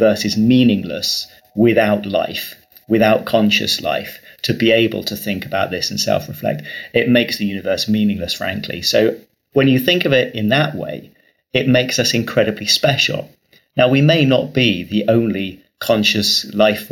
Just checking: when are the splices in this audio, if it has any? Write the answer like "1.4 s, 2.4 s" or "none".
none